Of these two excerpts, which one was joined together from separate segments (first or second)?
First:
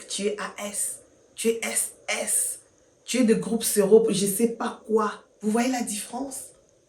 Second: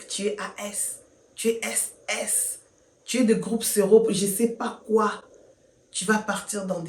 first